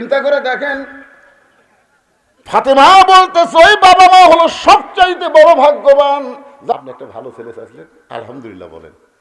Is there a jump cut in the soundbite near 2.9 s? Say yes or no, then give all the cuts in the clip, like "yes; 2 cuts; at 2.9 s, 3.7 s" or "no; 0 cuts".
no; 1 cut; at 6.7 s